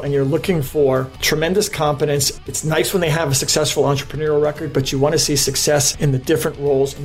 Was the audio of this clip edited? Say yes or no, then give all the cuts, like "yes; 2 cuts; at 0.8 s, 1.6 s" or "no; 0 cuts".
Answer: no; 0 cuts